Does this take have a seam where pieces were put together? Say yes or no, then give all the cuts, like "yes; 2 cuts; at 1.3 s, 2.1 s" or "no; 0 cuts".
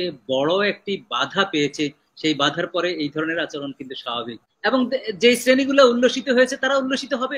yes; 1 cut; at 4.4 s